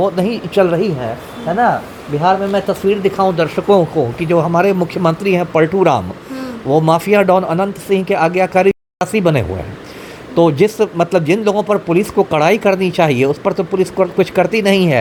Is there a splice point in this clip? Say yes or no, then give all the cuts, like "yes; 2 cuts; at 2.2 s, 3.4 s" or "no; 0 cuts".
no; 0 cuts